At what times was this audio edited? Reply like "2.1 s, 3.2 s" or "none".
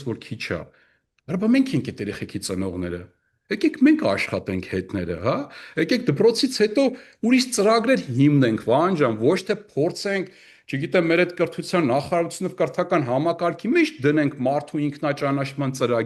none

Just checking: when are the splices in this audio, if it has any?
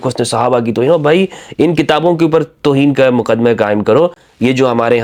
none

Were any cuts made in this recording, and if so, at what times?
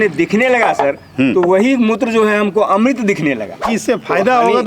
3.7 s

